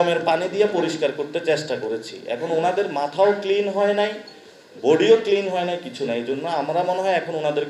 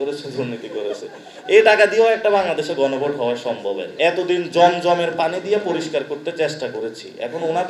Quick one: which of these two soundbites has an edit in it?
second; 1 cut; at 3.9 s

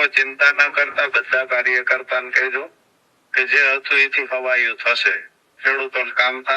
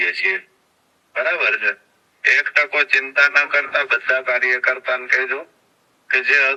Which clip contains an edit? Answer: first; 1 cut; at 5.5 s

